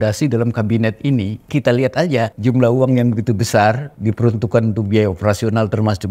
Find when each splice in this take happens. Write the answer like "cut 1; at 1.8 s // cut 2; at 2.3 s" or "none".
cut 1; at 1.5 s // cut 2; at 2.4 s // cut 3; at 3.9 s